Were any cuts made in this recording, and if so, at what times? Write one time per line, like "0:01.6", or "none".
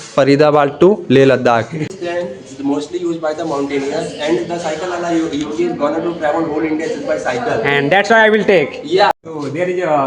0:01.8
0:09.1